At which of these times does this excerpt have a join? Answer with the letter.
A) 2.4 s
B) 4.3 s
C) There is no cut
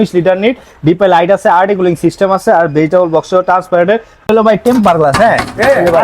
B